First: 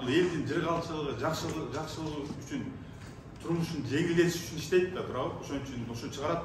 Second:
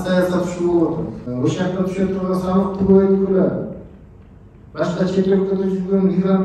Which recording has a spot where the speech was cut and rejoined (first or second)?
second